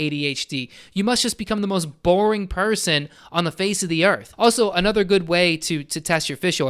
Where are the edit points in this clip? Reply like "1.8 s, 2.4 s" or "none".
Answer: 4.3 s